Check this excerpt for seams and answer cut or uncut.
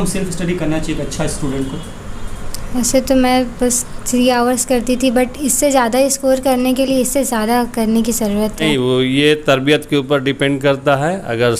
cut